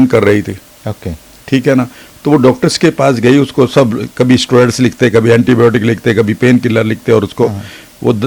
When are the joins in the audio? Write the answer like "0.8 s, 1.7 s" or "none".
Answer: none